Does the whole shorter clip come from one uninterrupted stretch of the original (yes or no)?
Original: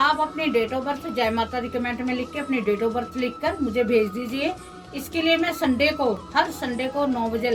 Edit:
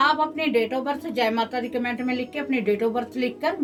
yes